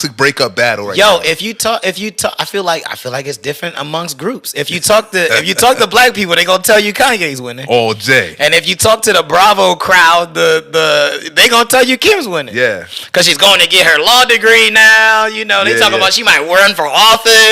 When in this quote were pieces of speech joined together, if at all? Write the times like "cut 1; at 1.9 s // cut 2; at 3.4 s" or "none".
none